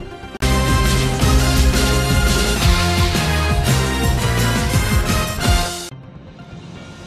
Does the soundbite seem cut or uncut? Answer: uncut